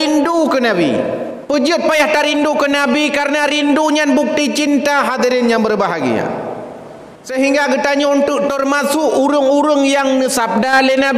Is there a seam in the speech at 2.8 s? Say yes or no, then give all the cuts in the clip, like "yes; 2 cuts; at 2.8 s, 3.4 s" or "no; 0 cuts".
no; 2 cuts; at 1.3 s, 7.3 s